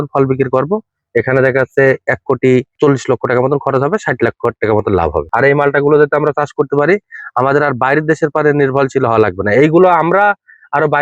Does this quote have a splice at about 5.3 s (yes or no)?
yes